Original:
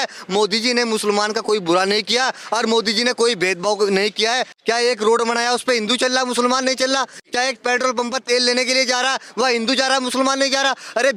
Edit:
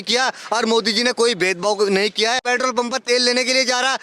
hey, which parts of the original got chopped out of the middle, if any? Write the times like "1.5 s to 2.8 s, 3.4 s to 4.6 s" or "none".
4.4 s to 7.6 s